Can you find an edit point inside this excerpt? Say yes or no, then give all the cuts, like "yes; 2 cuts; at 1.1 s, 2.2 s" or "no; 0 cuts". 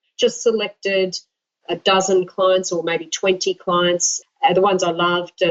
yes; 2 cuts; at 1.6 s, 4.2 s